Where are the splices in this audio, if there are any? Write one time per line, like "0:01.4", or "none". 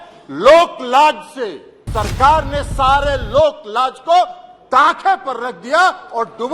0:01.8